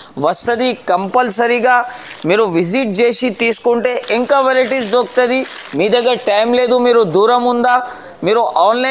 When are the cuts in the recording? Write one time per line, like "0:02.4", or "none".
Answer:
none

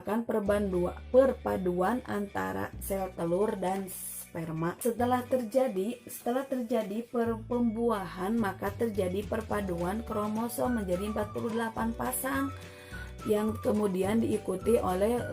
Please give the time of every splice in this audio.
0:04.8

